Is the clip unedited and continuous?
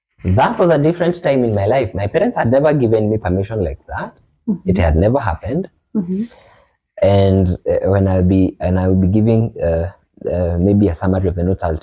yes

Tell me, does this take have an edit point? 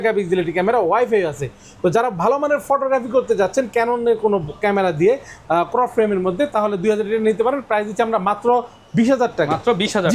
no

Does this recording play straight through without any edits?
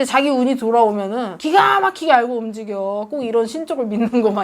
no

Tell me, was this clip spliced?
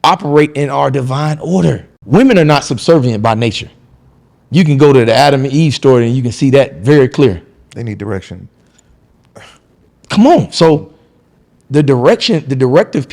yes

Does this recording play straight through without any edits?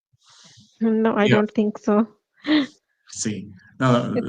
yes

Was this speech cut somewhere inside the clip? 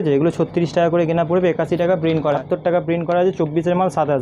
yes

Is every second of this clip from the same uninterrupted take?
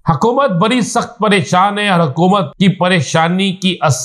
no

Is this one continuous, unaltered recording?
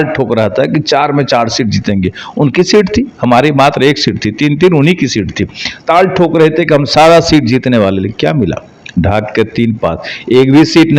yes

